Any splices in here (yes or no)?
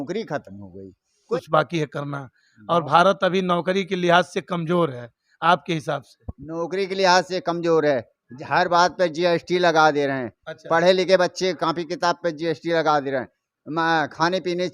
yes